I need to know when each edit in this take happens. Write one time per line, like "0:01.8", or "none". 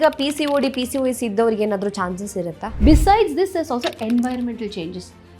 0:02.8